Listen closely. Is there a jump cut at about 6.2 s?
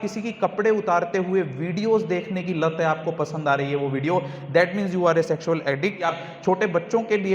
yes; 1 cut; at 6.2 s

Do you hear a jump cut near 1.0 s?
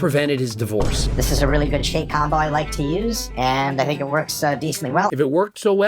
yes; 1 cut; at 1.0 s

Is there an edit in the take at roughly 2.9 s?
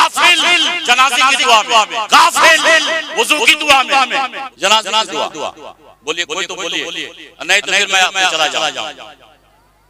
no; 1 cut; at 4.4 s

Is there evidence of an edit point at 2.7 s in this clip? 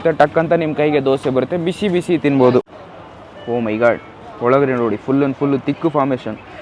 yes; 1 cut; at 2.7 s

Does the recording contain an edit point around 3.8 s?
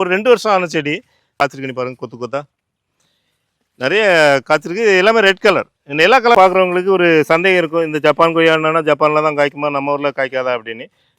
no; 2 cuts; at 1.3 s, 6.4 s

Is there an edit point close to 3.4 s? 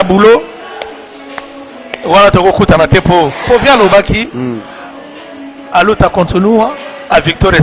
yes; 1 cut; at 3.4 s

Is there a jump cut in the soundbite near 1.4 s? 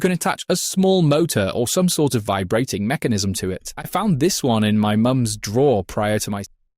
no; 1 cut; at 3.7 s

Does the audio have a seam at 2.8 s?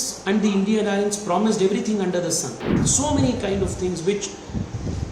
yes; 1 cut; at 2.8 s

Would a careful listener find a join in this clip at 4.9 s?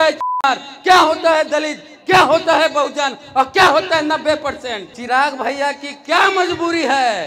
yes; 1 cut; at 4.9 s

